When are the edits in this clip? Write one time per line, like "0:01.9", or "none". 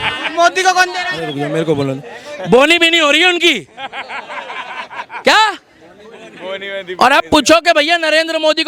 none